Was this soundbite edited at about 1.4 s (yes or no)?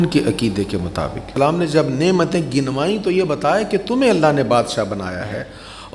yes